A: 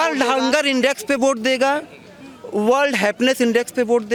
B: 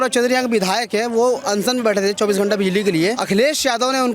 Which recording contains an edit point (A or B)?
B